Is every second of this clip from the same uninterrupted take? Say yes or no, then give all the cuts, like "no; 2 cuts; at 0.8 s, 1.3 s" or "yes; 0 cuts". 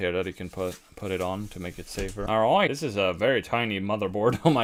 yes; 0 cuts